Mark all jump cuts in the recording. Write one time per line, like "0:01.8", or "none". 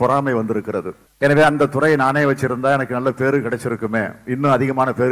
0:01.0